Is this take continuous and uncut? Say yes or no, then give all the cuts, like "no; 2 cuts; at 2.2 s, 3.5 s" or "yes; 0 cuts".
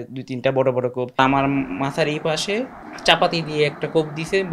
no; 2 cuts; at 1.2 s, 2.8 s